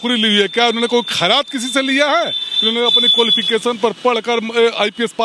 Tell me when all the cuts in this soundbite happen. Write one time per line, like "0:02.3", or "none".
none